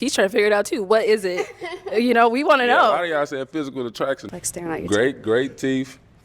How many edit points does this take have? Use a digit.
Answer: 1